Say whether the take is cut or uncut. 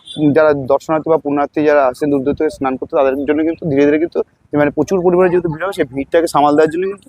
uncut